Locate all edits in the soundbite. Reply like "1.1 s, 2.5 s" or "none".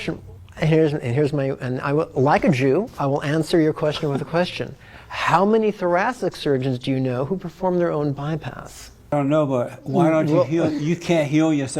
9.1 s